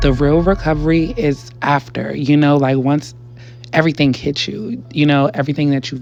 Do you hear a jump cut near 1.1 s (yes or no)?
no